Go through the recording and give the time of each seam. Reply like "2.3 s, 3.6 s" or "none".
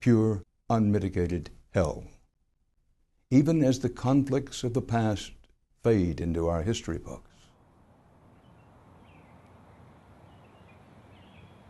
1.3 s

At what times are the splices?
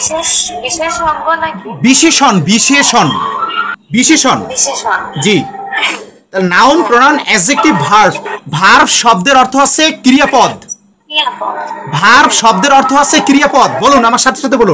none

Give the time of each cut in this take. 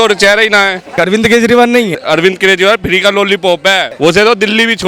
0.9 s, 2.0 s, 3.9 s

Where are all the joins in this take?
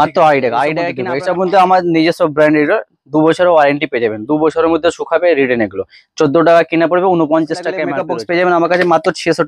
1.0 s, 7.9 s

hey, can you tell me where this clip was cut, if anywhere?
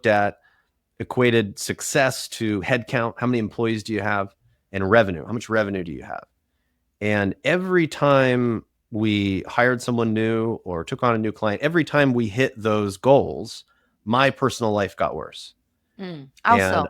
none

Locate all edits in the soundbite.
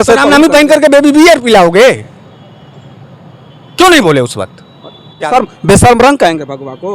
5.1 s

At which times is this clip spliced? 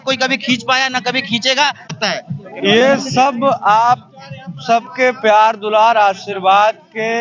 1.9 s

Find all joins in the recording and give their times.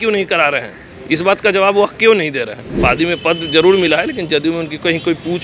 2.6 s

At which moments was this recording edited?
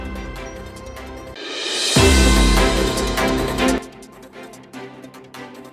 1.4 s, 3.8 s

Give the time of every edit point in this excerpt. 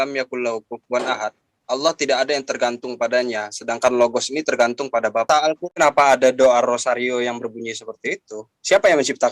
5.6 s

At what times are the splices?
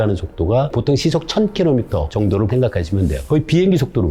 3.2 s

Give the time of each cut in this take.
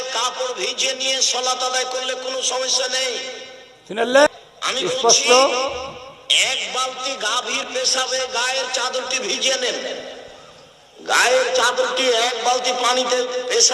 4.3 s

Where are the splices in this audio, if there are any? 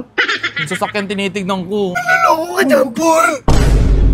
2.0 s

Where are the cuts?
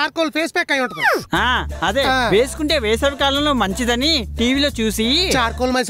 none

